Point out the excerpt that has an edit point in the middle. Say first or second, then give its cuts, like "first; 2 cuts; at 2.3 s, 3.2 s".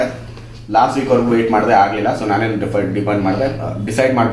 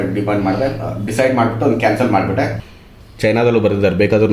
second; 1 cut; at 2.6 s